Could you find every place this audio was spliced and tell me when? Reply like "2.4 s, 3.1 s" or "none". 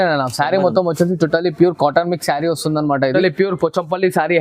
3.2 s

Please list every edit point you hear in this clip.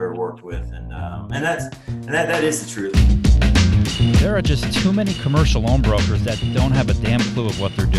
2.9 s

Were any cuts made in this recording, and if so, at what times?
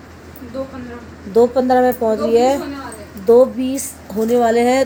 none

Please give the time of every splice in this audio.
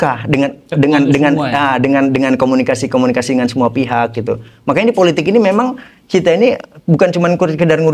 none

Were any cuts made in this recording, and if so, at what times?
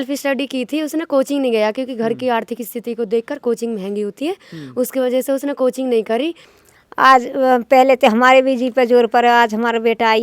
6.5 s

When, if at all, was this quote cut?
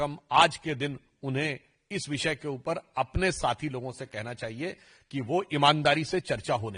none

